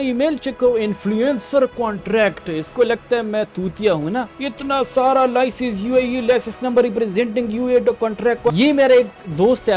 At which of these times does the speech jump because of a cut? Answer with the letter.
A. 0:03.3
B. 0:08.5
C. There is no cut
B